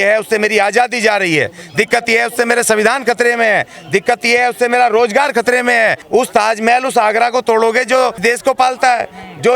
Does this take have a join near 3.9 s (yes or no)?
no